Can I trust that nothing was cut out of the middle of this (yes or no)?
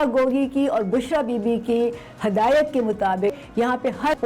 yes